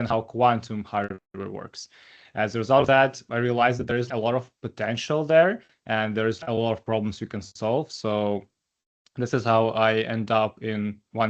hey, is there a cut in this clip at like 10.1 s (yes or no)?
no